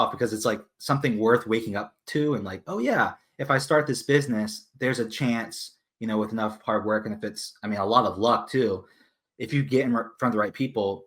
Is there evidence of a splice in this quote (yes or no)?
no